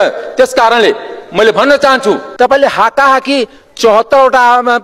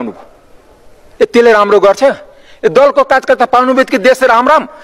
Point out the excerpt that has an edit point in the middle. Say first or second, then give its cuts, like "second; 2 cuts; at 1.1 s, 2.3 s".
first; 1 cut; at 2.3 s